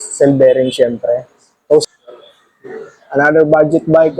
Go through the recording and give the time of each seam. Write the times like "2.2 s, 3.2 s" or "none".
1.8 s